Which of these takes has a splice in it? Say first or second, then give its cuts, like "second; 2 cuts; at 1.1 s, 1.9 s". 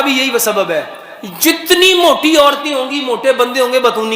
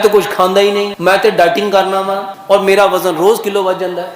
second; 2 cuts; at 0.9 s, 2.3 s